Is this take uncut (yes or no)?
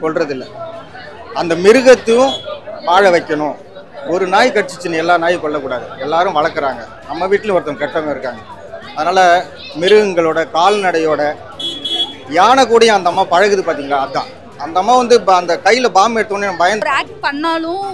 no